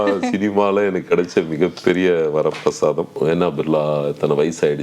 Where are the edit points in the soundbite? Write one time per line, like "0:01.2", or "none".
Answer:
0:03.1